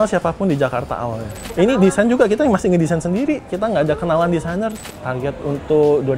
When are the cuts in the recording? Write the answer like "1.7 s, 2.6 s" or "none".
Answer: 1.4 s, 4.8 s